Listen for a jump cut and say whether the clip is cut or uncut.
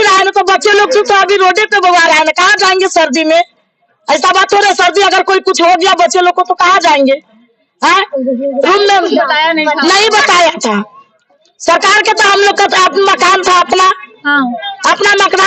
uncut